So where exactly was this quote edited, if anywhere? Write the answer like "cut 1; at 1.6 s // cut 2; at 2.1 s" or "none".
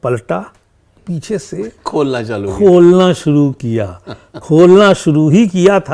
cut 1; at 1.0 s